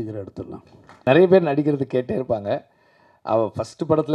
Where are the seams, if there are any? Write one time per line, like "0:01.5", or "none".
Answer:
0:01.0